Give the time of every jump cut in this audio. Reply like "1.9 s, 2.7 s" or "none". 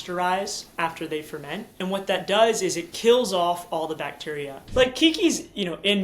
1.7 s, 4.6 s